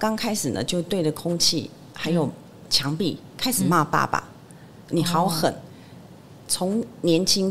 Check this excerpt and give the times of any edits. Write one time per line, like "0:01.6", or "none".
none